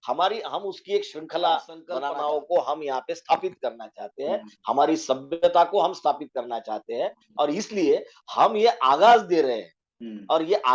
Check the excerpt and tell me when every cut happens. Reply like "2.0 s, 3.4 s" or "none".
1.9 s